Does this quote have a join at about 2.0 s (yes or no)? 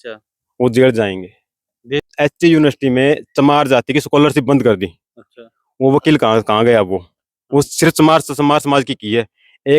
yes